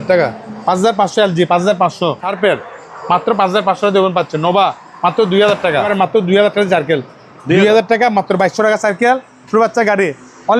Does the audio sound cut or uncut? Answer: cut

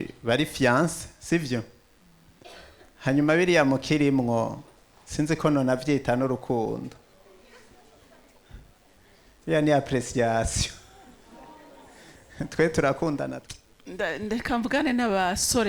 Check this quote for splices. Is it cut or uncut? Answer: cut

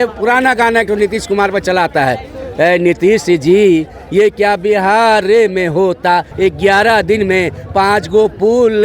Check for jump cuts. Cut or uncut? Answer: cut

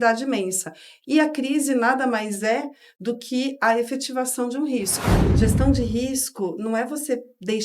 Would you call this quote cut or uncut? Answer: cut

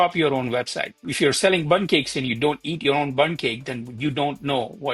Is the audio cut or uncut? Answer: cut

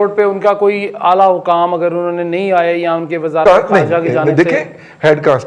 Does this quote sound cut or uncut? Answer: uncut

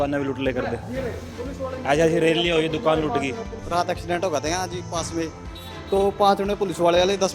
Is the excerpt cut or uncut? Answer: cut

